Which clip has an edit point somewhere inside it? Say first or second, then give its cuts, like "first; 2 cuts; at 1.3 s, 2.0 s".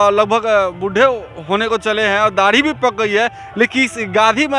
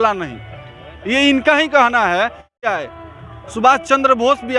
second; 1 cut; at 2.6 s